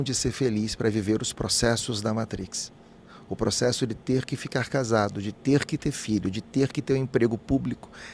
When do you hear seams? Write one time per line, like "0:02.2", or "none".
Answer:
none